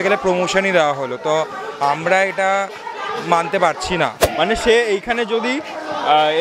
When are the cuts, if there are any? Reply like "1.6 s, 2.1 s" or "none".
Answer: 4.2 s